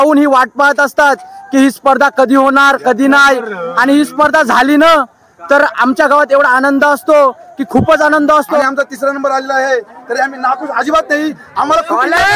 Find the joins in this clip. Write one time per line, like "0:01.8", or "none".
0:08.6